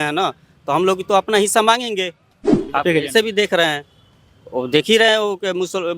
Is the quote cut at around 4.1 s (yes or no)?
no